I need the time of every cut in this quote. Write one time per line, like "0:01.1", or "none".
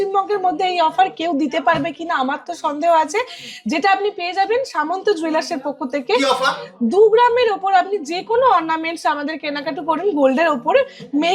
none